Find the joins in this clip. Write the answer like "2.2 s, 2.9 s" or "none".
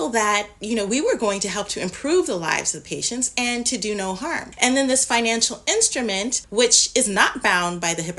4.5 s, 6.4 s